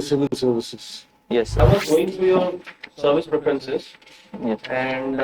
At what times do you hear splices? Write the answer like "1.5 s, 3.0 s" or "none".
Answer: 1.6 s